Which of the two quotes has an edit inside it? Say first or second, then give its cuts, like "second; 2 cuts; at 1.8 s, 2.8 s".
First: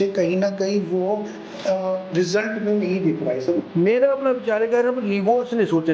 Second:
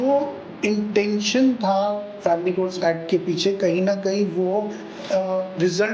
first; 1 cut; at 3.6 s